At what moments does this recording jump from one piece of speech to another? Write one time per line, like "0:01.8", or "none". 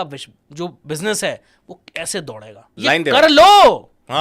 0:02.7